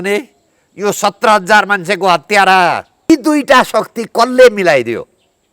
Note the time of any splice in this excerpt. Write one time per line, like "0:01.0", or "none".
0:03.1